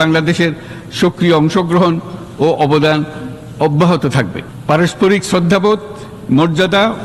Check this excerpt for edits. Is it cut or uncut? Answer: uncut